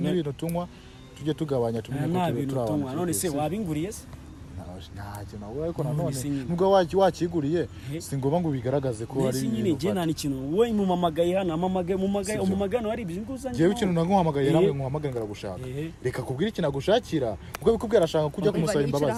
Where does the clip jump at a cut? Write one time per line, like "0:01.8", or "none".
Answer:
none